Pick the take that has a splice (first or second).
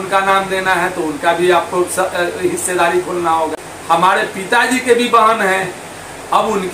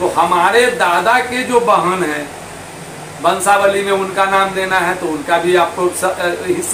first